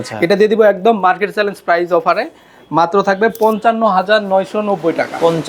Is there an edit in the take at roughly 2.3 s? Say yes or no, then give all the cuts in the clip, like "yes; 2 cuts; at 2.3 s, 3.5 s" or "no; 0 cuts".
no; 0 cuts